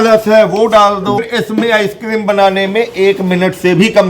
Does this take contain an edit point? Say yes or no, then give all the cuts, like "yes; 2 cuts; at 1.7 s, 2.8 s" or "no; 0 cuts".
yes; 1 cut; at 1.2 s